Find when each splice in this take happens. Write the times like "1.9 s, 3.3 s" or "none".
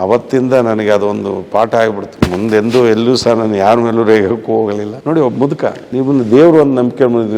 none